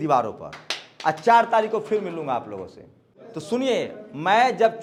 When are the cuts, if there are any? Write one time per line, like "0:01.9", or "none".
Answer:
none

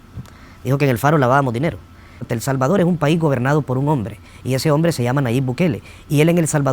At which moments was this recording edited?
0:02.3

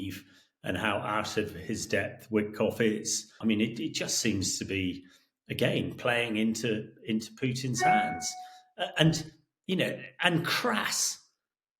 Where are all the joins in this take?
0:03.4

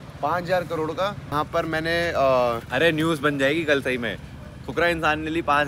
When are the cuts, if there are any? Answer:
0:01.3

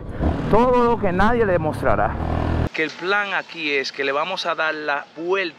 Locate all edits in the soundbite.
0:02.7

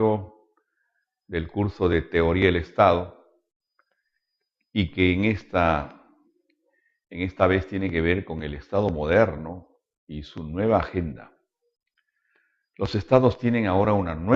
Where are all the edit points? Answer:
none

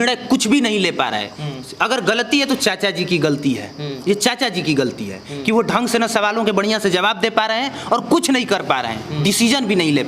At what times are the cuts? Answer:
none

